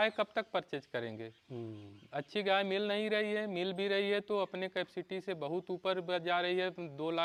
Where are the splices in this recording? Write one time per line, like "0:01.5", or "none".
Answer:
none